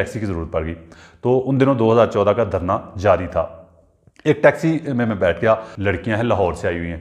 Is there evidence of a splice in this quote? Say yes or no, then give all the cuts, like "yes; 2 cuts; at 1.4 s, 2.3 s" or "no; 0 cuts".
yes; 1 cut; at 5.7 s